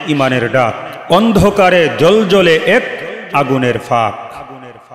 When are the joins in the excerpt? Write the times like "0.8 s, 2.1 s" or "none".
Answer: none